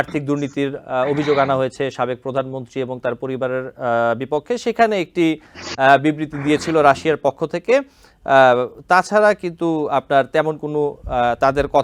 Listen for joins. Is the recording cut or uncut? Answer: uncut